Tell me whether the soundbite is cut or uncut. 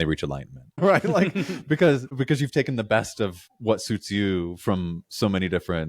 cut